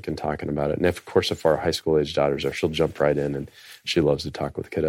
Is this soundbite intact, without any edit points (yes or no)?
yes